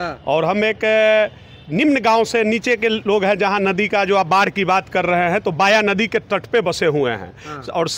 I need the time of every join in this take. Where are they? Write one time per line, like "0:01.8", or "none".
none